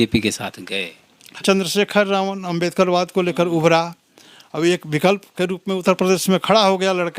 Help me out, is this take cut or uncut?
cut